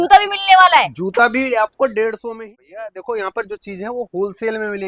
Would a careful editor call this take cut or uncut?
cut